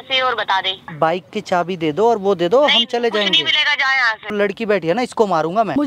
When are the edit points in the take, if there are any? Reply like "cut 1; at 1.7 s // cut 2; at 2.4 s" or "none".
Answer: cut 1; at 0.9 s // cut 2; at 4.3 s